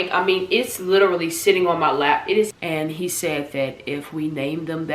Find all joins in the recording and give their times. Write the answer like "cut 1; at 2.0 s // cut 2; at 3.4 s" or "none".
cut 1; at 2.5 s